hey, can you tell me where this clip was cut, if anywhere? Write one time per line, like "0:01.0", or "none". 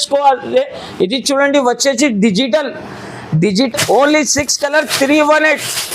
0:03.7

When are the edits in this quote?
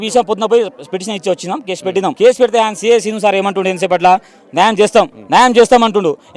0:02.2
0:05.2

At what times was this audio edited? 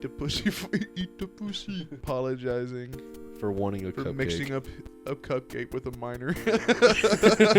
0:02.0

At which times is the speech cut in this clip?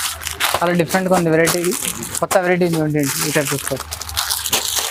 none

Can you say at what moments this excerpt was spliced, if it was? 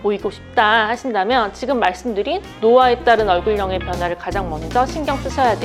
none

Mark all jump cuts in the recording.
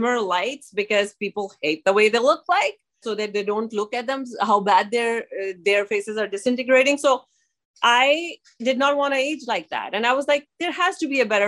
0:03.1

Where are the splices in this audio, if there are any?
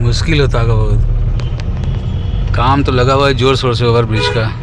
none

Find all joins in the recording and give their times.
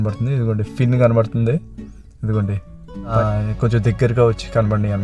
0:03.1

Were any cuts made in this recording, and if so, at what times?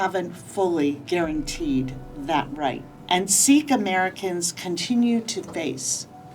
0:01.0
0:02.9

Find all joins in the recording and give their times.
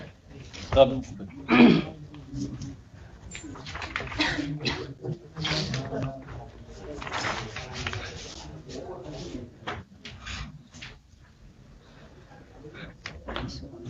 none

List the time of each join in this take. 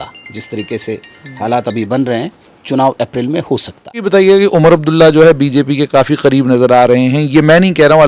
0:04.0

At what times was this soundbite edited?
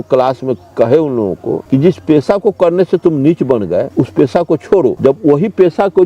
0:01.6
0:03.9
0:05.0

